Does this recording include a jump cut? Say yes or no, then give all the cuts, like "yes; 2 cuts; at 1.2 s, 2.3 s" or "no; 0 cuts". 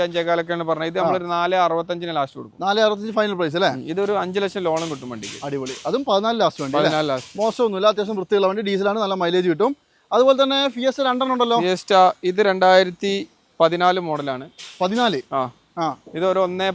no; 0 cuts